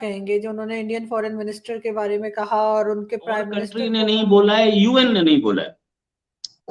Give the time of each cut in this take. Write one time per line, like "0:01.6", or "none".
0:03.8